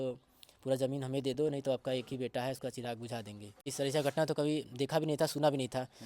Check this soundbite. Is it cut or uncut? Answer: cut